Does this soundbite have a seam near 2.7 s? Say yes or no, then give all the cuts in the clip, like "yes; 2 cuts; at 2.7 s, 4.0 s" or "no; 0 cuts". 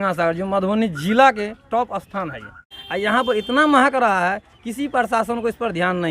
yes; 1 cut; at 2.7 s